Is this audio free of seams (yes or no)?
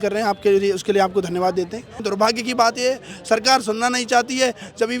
no